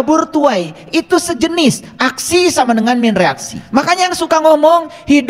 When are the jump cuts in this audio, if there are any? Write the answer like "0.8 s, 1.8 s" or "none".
3.5 s

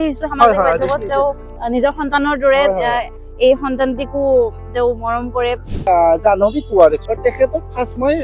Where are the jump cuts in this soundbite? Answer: 1.5 s, 5.8 s, 7.0 s

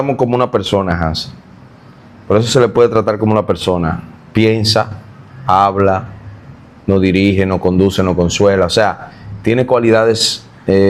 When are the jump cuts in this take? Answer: none

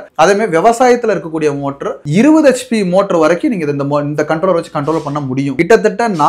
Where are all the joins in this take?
2.0 s, 5.5 s

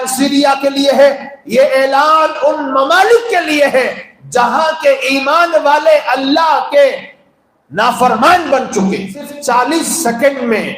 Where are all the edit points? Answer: 9.3 s

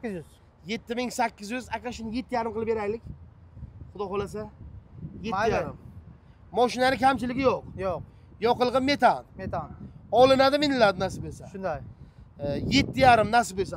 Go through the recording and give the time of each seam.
none

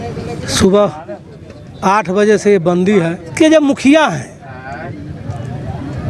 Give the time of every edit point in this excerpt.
3.3 s

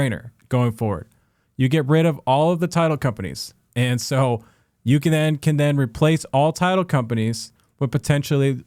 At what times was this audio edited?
none

